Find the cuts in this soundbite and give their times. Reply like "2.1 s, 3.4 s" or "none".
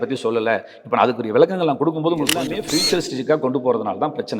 2.6 s